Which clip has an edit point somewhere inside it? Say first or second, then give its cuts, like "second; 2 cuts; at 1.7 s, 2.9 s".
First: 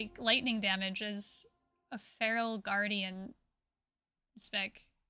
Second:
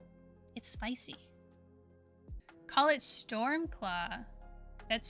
second; 1 cut; at 2.4 s